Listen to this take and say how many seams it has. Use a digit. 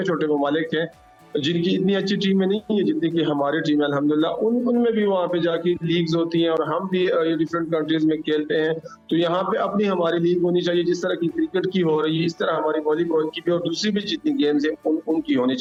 0